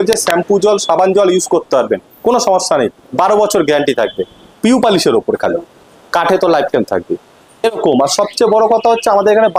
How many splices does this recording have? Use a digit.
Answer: 1